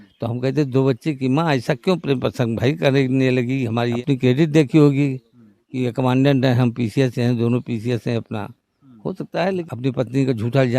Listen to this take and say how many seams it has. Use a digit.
2